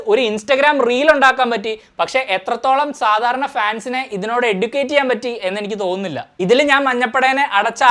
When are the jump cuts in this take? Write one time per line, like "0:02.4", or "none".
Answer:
none